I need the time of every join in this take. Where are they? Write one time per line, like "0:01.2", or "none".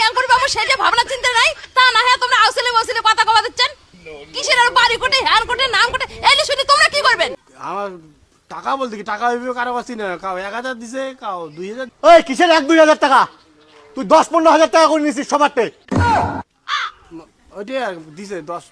0:07.3